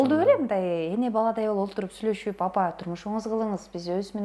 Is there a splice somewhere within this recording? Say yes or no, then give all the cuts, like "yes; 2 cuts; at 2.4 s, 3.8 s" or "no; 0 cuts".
no; 0 cuts